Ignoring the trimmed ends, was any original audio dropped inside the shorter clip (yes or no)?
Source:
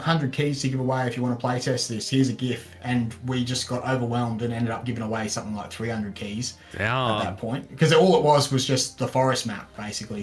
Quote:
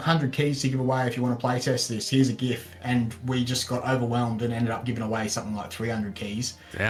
no